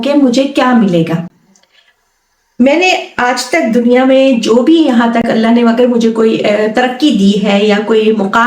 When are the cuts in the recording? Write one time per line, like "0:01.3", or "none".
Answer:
none